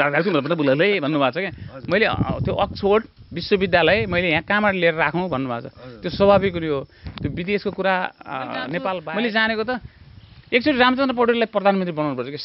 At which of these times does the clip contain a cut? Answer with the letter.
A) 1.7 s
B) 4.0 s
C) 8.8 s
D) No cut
C